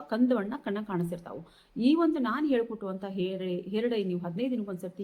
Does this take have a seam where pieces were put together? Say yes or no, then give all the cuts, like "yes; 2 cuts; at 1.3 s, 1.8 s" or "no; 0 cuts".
no; 0 cuts